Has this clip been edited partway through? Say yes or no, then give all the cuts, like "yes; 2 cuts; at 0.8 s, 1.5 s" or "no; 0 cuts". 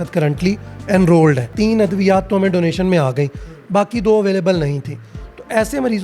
yes; 1 cut; at 1.5 s